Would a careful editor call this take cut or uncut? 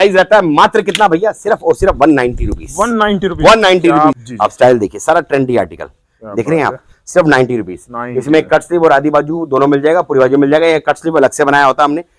cut